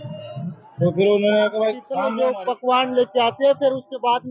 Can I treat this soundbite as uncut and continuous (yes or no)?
no